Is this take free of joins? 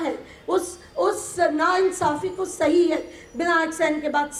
yes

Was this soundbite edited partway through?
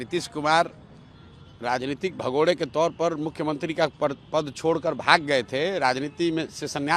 no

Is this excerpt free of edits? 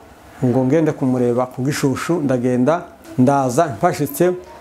no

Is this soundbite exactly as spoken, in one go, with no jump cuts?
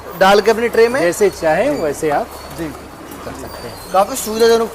yes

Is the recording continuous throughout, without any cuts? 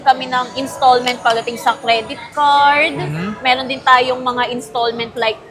yes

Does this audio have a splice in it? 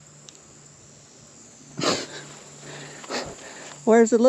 no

